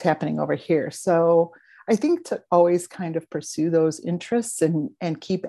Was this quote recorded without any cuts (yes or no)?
yes